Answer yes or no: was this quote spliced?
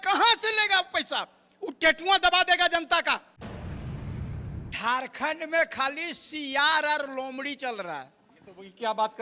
yes